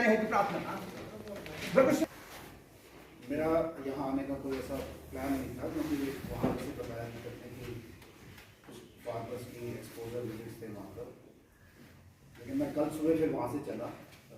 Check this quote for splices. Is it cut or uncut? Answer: cut